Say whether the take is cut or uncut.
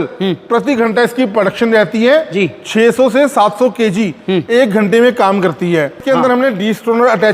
cut